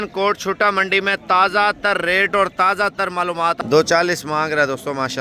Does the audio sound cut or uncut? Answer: cut